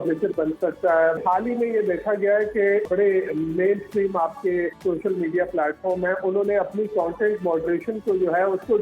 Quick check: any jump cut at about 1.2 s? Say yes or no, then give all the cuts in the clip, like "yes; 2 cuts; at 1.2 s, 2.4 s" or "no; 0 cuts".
yes; 3 cuts; at 1.2 s, 2.9 s, 4.8 s